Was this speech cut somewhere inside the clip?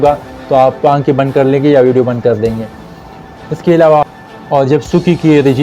yes; 1 cut; at 4.1 s

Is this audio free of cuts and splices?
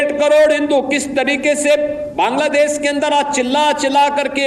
yes; 0 cuts

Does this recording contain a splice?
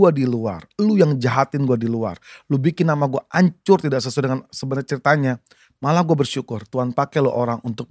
no; 0 cuts

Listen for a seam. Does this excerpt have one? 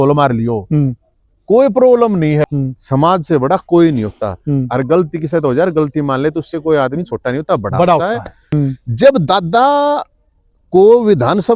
yes; 2 cuts; at 2.4 s, 8.4 s

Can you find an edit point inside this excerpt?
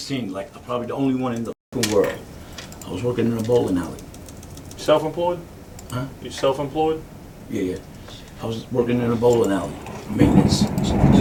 no; 0 cuts

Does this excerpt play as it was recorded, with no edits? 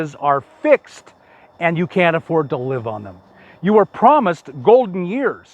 yes; 0 cuts

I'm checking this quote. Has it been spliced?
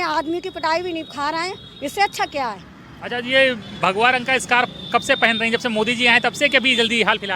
no; 0 cuts

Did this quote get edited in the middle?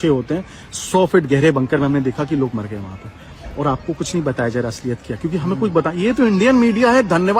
no; 0 cuts

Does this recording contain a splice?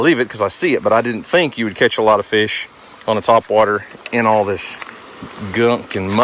no; 0 cuts

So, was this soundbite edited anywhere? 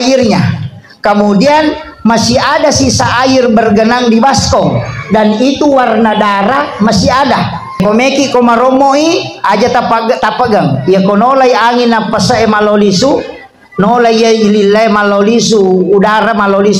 yes; 1 cut; at 7.8 s

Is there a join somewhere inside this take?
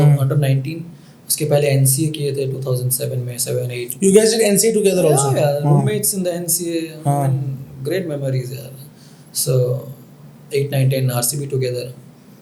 no; 0 cuts

